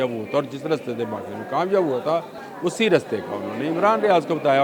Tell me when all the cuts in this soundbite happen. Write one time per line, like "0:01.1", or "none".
0:02.4